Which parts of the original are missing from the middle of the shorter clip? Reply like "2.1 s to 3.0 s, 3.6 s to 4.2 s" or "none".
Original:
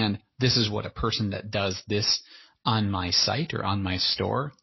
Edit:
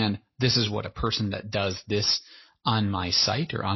none